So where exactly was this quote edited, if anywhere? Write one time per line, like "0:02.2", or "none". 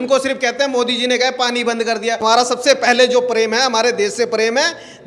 0:02.2